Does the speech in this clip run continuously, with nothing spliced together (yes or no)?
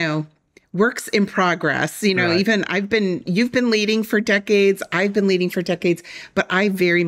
yes